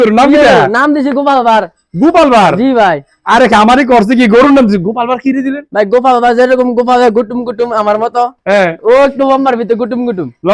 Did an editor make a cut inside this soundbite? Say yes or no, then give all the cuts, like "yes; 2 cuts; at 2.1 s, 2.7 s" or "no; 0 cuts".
no; 0 cuts